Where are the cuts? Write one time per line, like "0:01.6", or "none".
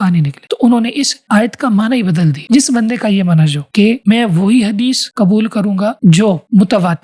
none